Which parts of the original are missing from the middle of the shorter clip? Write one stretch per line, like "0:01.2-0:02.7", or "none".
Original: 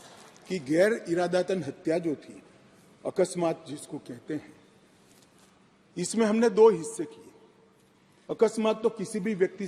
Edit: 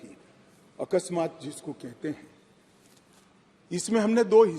none